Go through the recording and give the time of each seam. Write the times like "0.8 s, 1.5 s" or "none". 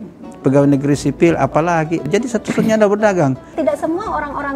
2.0 s, 3.6 s